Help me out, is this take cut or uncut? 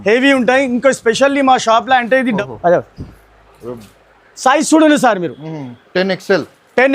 cut